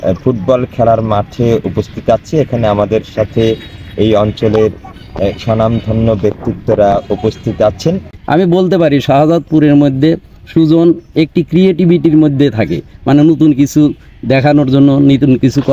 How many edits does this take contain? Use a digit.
1